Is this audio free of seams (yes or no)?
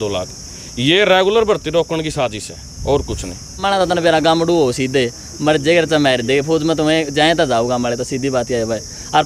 no